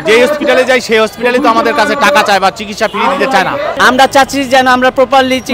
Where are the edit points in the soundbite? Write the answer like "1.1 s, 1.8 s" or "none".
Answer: 3.7 s